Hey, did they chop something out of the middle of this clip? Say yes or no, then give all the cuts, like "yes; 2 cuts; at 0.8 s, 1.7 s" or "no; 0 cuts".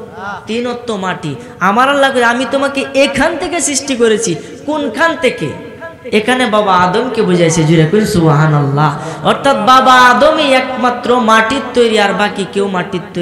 no; 0 cuts